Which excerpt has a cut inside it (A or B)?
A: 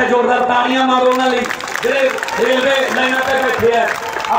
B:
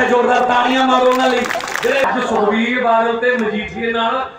B